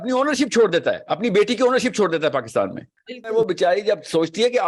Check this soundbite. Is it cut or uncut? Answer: cut